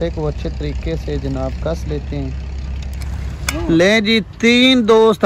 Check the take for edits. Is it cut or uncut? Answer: uncut